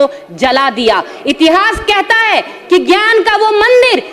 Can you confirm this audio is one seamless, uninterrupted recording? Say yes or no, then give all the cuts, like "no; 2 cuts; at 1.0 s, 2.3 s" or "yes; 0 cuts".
yes; 0 cuts